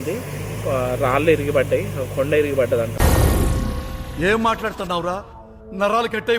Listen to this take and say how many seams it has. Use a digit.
1